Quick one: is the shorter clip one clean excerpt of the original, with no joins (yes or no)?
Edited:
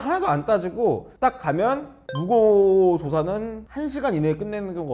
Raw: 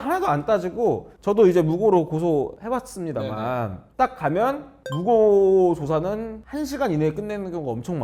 no